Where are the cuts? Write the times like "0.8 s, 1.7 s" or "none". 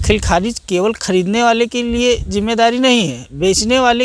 none